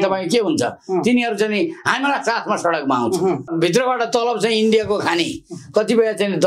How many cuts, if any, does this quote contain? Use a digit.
1